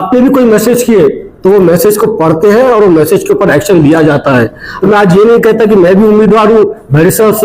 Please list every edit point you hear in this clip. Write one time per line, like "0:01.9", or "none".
0:04.7